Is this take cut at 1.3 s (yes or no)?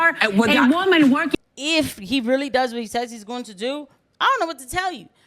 yes